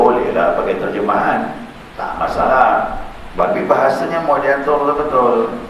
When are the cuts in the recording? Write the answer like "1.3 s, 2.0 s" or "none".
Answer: 3.4 s